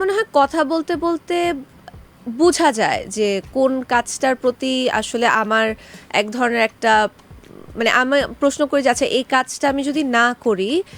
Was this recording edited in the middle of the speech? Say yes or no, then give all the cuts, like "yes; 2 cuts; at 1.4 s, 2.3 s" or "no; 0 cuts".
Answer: no; 0 cuts